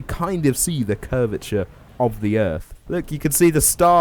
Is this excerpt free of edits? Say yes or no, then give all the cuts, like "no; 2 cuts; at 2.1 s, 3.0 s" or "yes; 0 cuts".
no; 1 cut; at 2.8 s